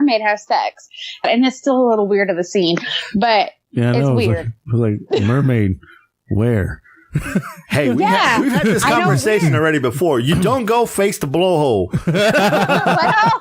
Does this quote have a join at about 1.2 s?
yes; 1 cut; at 1.2 s

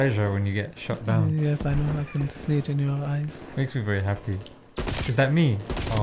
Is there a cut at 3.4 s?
yes; 1 cut; at 3.4 s

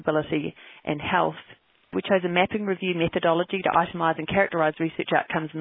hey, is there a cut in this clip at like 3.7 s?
no; 1 cut; at 1.9 s

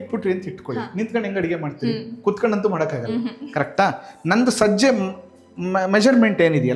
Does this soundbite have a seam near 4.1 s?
no; 0 cuts

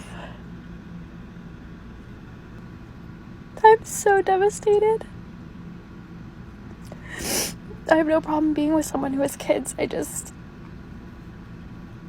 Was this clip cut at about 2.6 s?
yes; 1 cut; at 2.6 s

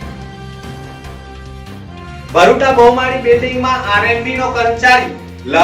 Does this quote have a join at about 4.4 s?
no; 1 cut; at 0.9 s

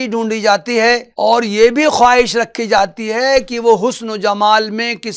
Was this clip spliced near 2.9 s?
no; 1 cut; at 1.1 s

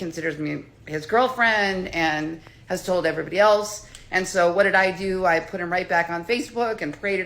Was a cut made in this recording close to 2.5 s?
no; 1 cut; at 3.9 s

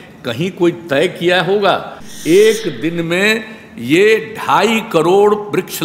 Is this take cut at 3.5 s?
no; 1 cut; at 2.0 s

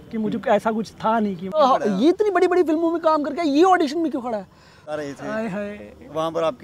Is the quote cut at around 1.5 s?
yes; 2 cuts; at 1.5 s, 4.9 s

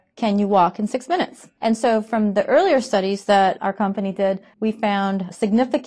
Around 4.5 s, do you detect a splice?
yes; 2 cuts; at 1.4 s, 4.5 s

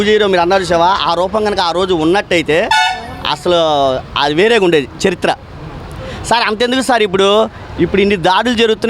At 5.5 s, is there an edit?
no; 0 cuts

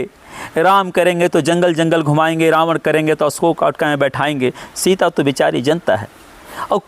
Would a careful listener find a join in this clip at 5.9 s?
no; 0 cuts

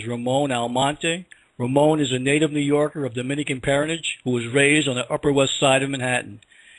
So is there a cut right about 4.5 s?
yes; 1 cut; at 4.5 s

